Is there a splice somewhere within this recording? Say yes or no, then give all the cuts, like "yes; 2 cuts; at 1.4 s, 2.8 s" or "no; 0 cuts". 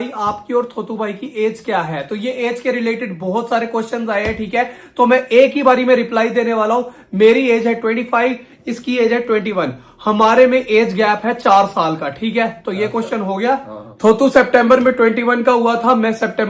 no; 0 cuts